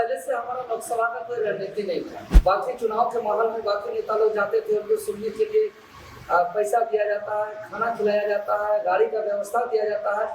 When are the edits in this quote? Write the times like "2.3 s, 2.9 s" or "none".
2.2 s